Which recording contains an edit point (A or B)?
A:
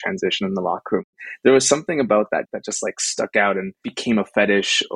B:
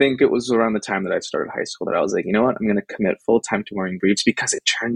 A